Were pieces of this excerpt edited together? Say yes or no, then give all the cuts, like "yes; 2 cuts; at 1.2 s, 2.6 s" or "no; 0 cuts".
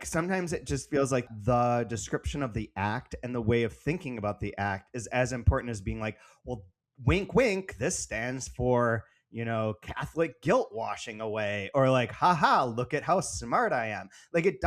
yes; 1 cut; at 1.3 s